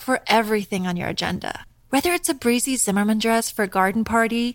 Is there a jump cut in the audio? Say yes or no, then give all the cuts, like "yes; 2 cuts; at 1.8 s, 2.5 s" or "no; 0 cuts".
no; 0 cuts